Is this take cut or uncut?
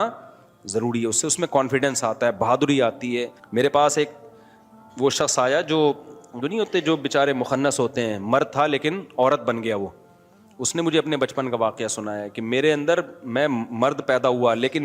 cut